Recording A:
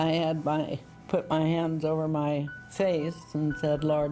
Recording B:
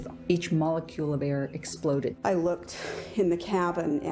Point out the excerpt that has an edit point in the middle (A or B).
B